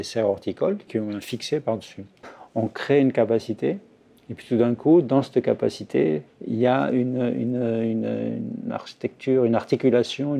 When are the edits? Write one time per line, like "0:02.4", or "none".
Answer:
0:00.8
0:02.2